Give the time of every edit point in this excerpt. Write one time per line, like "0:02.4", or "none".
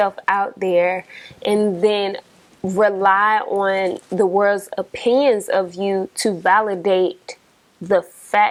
none